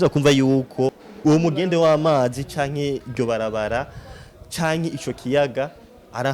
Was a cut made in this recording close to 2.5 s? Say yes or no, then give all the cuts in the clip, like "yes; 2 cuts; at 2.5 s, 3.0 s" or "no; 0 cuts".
no; 1 cut; at 1.1 s